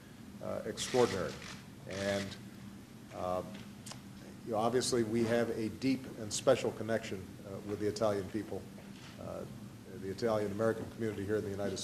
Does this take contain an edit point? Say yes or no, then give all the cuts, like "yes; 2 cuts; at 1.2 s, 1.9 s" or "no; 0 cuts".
no; 0 cuts